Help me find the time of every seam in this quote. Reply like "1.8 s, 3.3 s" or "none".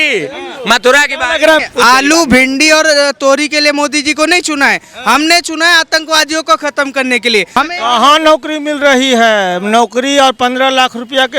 1.6 s, 7.6 s